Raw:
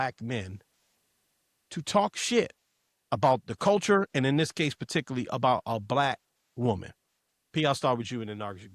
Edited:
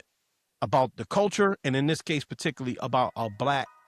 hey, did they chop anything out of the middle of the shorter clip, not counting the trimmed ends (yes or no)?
no